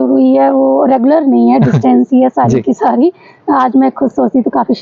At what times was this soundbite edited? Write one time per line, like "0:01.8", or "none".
none